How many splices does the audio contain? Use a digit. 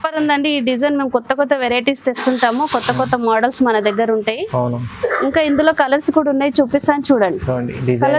0